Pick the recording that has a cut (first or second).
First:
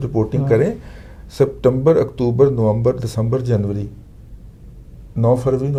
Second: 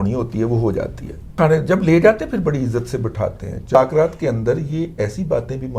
second